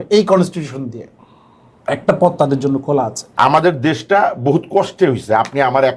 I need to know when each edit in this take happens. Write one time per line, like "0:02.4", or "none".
0:03.2